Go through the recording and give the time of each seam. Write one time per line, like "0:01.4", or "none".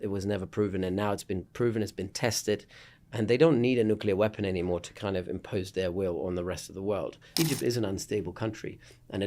0:07.2